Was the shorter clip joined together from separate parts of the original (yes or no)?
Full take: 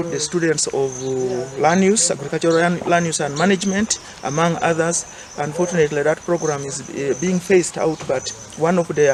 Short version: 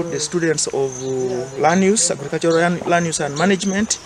no